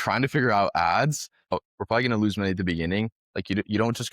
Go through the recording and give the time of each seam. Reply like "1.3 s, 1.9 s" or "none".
1.5 s, 3.2 s